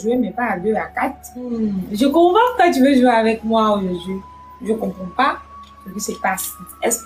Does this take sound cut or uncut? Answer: cut